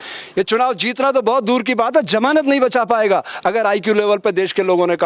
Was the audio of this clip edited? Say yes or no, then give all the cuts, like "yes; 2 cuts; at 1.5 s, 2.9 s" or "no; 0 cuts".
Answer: no; 0 cuts